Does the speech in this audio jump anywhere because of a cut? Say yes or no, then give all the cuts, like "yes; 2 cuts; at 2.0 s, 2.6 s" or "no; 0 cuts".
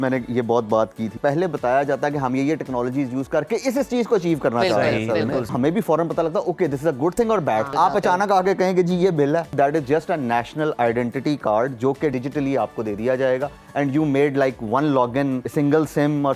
yes; 6 cuts; at 1.2 s, 5.5 s, 7.7 s, 9.5 s, 12.1 s, 15.5 s